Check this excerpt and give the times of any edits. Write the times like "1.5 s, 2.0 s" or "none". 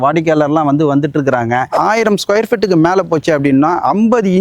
1.7 s